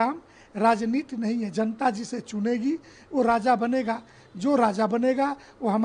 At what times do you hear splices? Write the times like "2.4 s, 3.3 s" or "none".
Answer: none